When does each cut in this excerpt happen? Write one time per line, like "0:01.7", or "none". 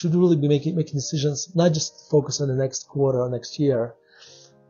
none